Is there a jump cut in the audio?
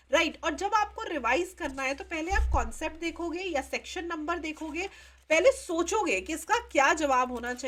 no; 0 cuts

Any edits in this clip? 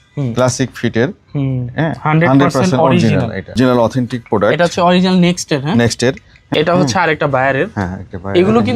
yes; 2 cuts; at 3.6 s, 6.3 s

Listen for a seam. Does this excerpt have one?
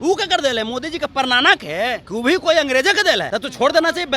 yes; 2 cuts; at 2.0 s, 3.3 s

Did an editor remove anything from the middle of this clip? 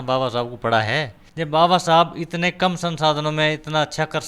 yes; 1 cut; at 1.2 s

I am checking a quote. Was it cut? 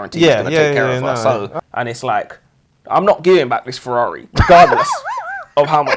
yes; 1 cut; at 1.5 s

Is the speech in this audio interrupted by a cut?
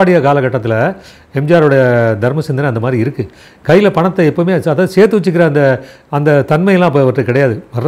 no; 0 cuts

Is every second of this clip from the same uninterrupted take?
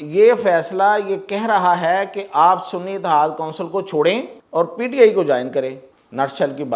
no; 2 cuts; at 4.4 s, 5.9 s

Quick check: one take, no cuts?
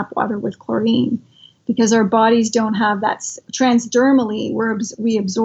no; 1 cut; at 3.5 s

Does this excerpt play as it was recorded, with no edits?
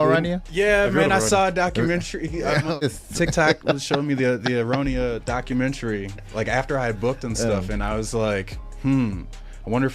no; 1 cut; at 2.7 s

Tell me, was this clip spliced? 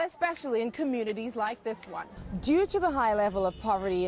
yes; 1 cut; at 2.2 s

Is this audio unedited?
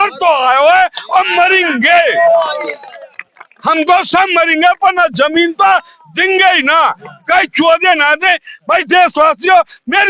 no; 1 cut; at 8.5 s

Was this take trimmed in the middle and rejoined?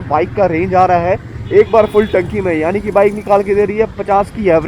no; 0 cuts

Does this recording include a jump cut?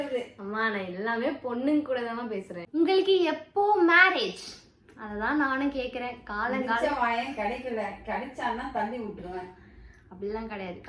yes; 1 cut; at 2.5 s

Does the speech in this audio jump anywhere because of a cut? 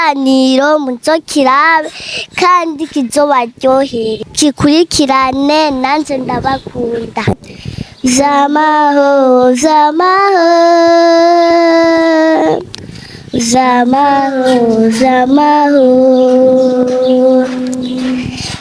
yes; 2 cuts; at 4.2 s, 7.3 s

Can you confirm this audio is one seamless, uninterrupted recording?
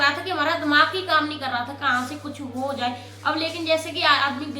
yes; 0 cuts

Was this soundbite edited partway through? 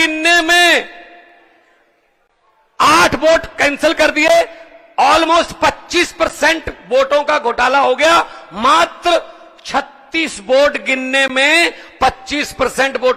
no; 0 cuts

